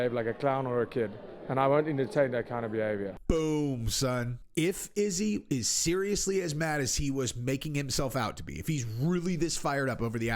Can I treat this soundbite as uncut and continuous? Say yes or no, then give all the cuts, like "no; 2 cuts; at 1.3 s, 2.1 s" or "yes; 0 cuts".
no; 2 cuts; at 3.2 s, 4.4 s